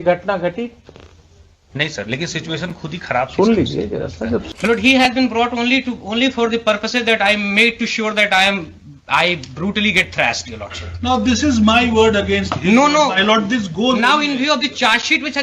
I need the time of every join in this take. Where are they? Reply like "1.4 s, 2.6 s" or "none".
4.5 s